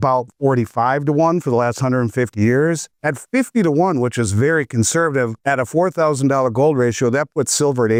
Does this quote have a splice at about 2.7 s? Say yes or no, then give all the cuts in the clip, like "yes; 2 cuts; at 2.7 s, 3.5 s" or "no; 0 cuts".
no; 0 cuts